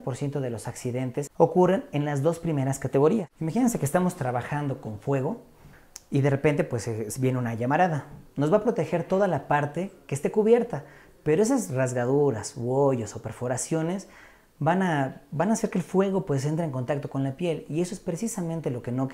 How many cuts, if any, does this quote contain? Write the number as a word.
two